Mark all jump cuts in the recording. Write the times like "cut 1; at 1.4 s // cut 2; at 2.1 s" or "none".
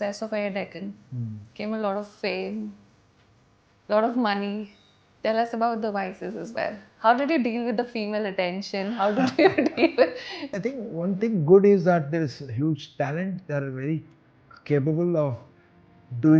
cut 1; at 10.4 s